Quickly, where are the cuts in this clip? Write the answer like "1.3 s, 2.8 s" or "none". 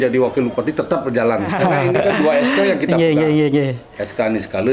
1.5 s